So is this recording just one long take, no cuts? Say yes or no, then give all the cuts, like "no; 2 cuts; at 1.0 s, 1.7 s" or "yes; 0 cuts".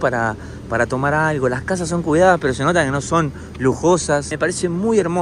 no; 1 cut; at 4.2 s